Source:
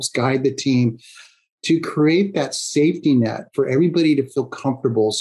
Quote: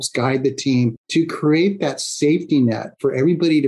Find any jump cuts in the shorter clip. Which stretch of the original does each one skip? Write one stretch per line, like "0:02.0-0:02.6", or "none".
0:01.0-0:01.6